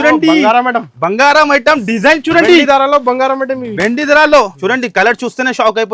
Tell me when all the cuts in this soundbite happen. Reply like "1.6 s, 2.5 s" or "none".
4.5 s

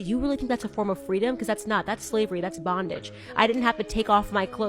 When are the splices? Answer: 3.6 s

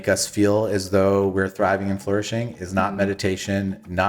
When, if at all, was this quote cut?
none

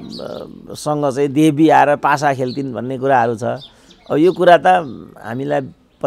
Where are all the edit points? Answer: none

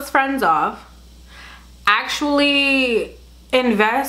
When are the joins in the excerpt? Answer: none

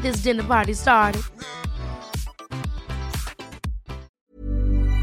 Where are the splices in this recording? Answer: 4.1 s

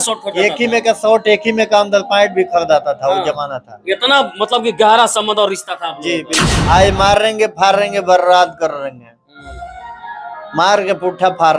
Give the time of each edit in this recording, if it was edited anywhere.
6.6 s

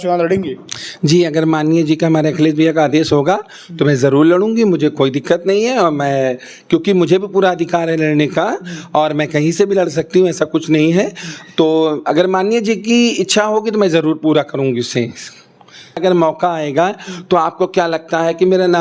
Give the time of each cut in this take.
16.0 s

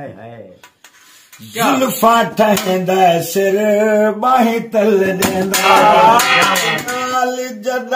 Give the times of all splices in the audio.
6.9 s

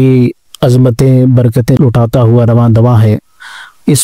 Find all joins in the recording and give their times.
1.8 s

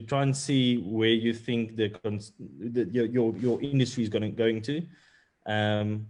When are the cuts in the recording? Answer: none

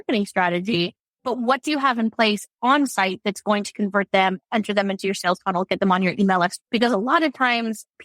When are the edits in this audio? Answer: 6.6 s

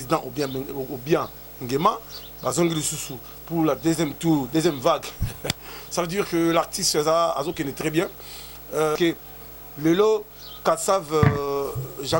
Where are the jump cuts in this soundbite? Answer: 9.0 s

